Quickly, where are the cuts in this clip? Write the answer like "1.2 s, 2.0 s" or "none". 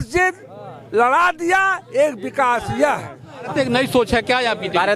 3.5 s